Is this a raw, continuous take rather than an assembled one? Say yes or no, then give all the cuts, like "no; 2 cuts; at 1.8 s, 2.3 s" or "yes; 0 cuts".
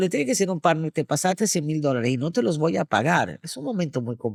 yes; 0 cuts